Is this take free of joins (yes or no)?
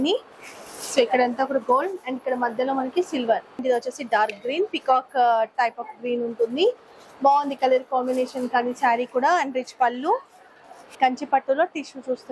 no